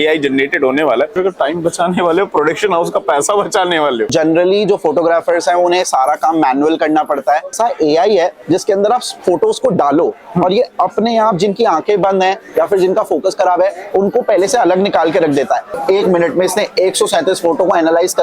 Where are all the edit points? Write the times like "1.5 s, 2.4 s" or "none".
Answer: 1.1 s, 4.1 s, 7.6 s, 15.7 s